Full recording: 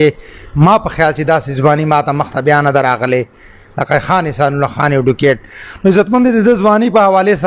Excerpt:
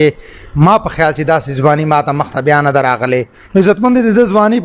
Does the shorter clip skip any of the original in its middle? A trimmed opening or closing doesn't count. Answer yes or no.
yes